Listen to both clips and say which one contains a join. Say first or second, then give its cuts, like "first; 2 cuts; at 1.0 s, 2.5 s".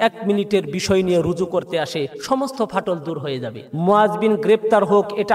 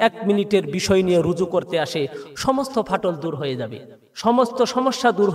first; 2 cuts; at 2.2 s, 3.6 s